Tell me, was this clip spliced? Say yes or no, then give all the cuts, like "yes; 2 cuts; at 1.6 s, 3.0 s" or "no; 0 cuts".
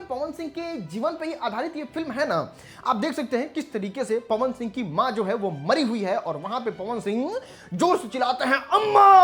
no; 0 cuts